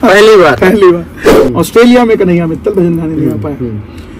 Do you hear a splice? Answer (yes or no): yes